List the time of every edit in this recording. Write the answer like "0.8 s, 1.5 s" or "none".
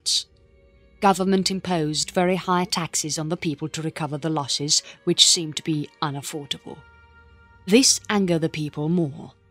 2.2 s